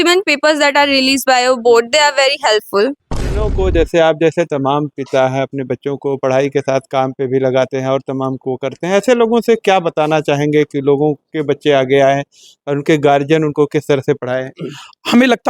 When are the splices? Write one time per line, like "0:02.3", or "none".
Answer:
0:03.4